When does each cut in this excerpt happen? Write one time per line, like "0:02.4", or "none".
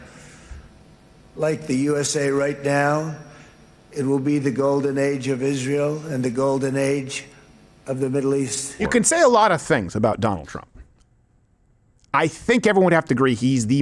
0:08.8